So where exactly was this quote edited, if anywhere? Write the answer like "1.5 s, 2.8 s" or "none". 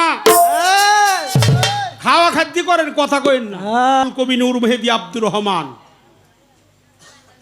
4.0 s